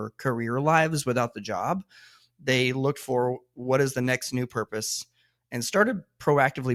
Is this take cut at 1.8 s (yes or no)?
no